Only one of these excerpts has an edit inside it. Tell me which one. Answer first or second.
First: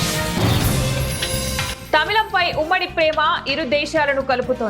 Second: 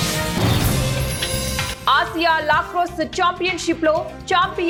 first